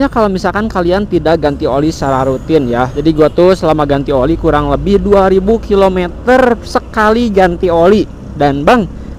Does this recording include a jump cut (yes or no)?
yes